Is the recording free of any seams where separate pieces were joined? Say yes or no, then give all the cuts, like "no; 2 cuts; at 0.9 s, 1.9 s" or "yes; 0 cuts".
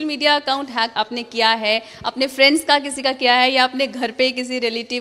no; 1 cut; at 0.9 s